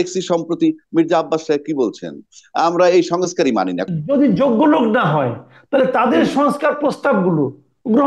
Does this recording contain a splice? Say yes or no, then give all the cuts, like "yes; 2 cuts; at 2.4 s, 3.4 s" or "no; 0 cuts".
yes; 1 cut; at 3.9 s